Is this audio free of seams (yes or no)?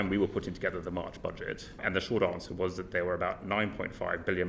no